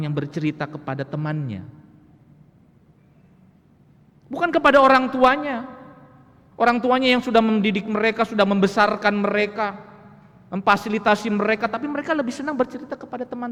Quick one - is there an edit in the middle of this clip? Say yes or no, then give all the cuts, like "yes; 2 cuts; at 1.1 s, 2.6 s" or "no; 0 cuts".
no; 0 cuts